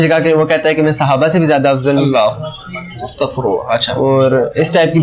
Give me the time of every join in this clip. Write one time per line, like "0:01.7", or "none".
none